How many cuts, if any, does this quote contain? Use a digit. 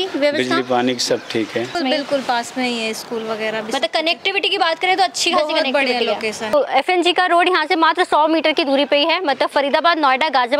2